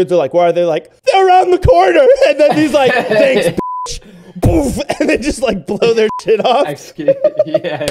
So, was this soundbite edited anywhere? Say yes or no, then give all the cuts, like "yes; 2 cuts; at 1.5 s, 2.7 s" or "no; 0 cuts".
no; 0 cuts